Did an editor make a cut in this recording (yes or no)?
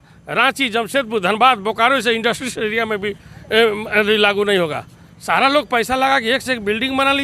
no